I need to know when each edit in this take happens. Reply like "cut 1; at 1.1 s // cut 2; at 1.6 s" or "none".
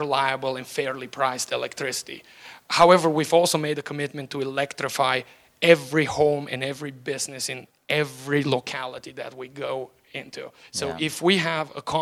none

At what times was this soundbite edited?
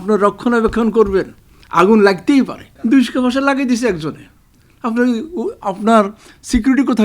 cut 1; at 2.7 s

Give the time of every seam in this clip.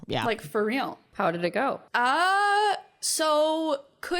cut 1; at 1.1 s // cut 2; at 1.8 s

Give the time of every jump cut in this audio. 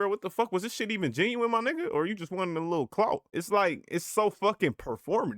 cut 1; at 3.3 s

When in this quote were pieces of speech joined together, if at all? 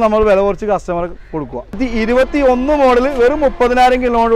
cut 1; at 1.8 s

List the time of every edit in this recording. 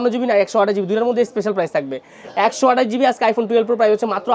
none

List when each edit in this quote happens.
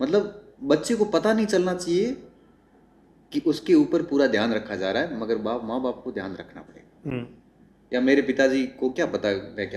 cut 1; at 7.1 s

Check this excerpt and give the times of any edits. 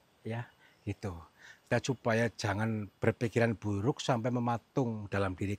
cut 1; at 1.7 s

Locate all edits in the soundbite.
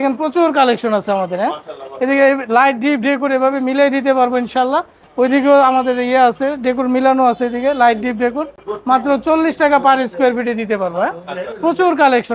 none

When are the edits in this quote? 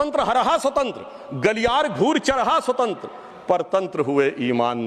none

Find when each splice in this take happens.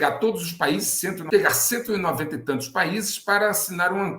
cut 1; at 1.2 s

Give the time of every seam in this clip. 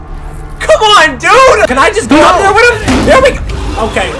cut 1; at 1.7 s

